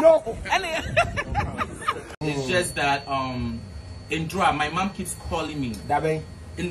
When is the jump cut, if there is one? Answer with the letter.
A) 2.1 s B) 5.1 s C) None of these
A